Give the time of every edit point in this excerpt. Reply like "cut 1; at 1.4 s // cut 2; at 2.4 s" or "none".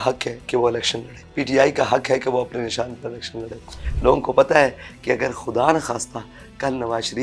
cut 1; at 1.2 s // cut 2; at 3.8 s